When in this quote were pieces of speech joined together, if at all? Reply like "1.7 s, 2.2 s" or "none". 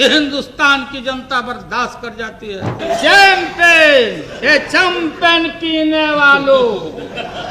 2.8 s